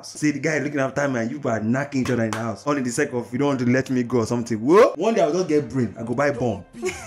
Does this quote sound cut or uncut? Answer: cut